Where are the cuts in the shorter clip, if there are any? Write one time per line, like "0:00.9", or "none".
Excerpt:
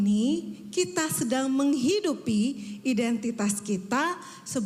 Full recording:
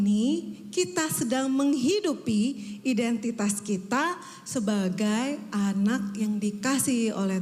none